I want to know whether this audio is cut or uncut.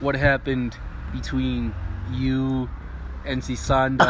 uncut